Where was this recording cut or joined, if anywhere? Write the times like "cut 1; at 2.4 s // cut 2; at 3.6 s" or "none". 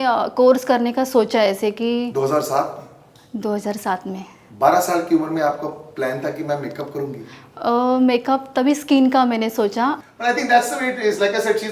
cut 1; at 10.0 s